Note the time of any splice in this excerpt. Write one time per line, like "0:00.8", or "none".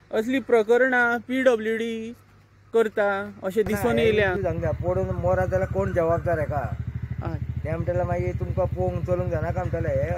0:04.3